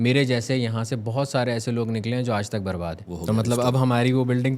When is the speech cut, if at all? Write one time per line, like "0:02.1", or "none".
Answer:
0:03.1